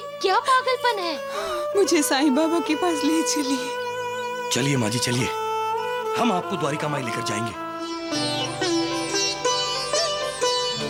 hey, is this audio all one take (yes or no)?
yes